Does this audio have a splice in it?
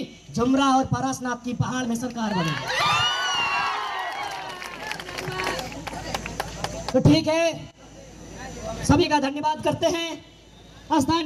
no; 0 cuts

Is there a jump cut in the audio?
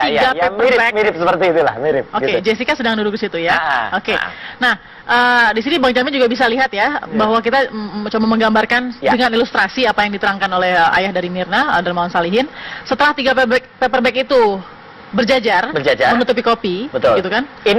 yes; 1 cut; at 15.7 s

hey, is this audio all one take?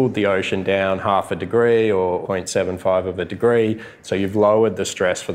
no; 2 cuts; at 2.2 s, 4.0 s

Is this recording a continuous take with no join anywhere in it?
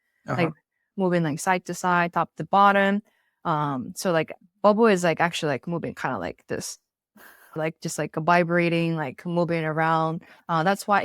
no; 1 cut; at 7.6 s

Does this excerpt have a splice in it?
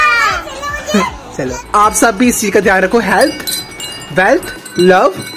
yes; 1 cut; at 1.6 s

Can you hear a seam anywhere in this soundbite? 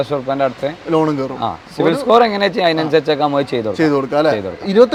no; 0 cuts

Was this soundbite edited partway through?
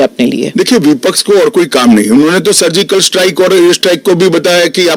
no; 0 cuts

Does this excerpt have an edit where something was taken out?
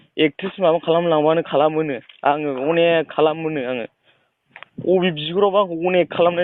no; 0 cuts

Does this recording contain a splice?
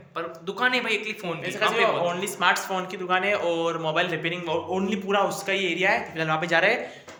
no; 0 cuts

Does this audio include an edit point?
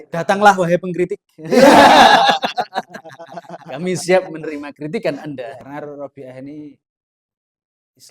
yes; 1 cut; at 5.6 s

